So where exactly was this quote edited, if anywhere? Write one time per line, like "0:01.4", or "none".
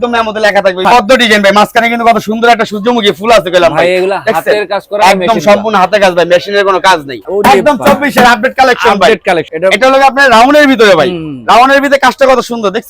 0:00.8
0:07.2
0:09.5